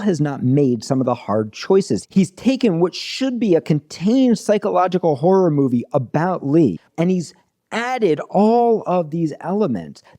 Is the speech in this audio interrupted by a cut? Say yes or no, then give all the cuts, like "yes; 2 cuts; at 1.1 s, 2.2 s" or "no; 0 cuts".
yes; 2 cuts; at 2.0 s, 6.8 s